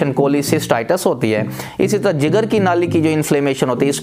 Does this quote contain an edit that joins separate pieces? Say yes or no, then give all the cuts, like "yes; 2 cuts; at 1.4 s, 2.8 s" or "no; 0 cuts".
no; 0 cuts